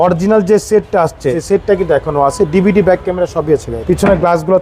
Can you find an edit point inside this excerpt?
yes; 2 cuts; at 1.4 s, 3.7 s

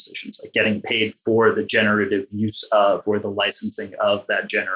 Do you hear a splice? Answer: no; 0 cuts

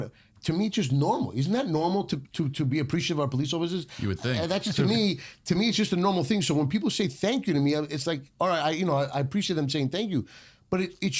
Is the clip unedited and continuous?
yes; 0 cuts

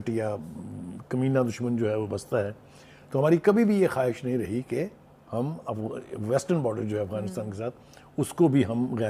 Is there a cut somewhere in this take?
no; 0 cuts

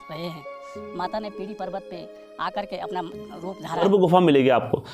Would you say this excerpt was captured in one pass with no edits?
no; 1 cut; at 3.8 s

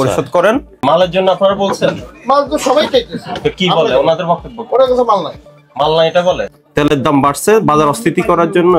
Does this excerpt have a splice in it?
yes; 2 cuts; at 0.8 s, 6.4 s

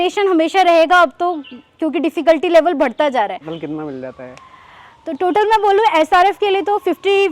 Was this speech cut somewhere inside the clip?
yes; 1 cut; at 3.5 s

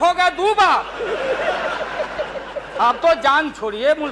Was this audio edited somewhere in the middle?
no; 0 cuts

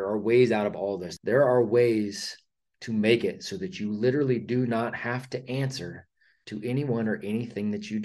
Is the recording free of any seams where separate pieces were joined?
no; 1 cut; at 1.1 s

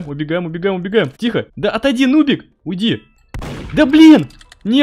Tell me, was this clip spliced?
yes; 1 cut; at 1.3 s

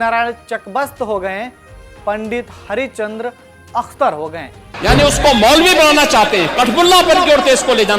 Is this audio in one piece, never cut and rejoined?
no; 1 cut; at 4.6 s

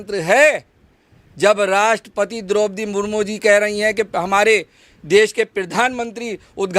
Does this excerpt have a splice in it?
no; 0 cuts

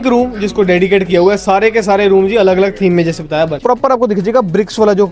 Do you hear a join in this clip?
yes; 1 cut; at 3.6 s

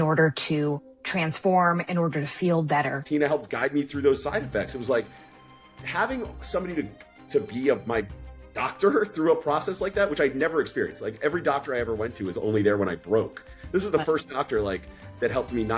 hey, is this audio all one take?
no; 2 cuts; at 0.9 s, 3.0 s

